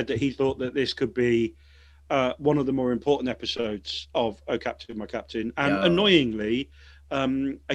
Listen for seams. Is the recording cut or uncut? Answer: uncut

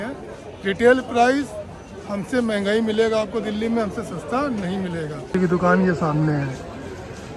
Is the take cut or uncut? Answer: cut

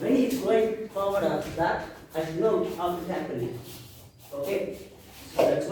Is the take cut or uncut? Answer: uncut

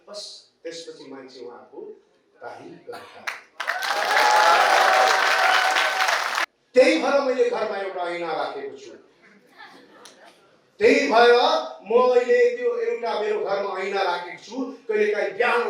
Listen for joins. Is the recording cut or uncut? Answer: cut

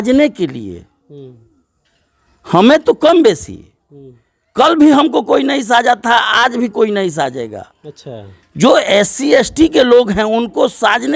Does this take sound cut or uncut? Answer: uncut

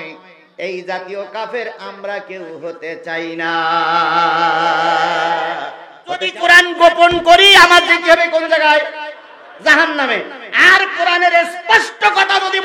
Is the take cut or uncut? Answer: cut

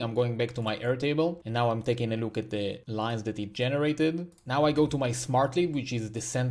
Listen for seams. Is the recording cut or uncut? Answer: cut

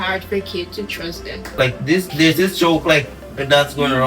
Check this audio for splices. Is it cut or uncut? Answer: cut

